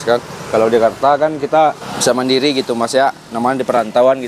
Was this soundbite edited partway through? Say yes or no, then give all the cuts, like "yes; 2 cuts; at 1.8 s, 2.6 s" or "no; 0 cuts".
yes; 1 cut; at 1.9 s